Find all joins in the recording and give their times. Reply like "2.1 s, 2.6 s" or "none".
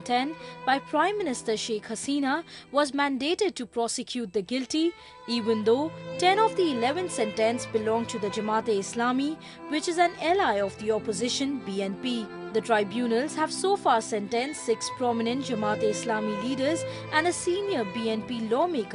4.2 s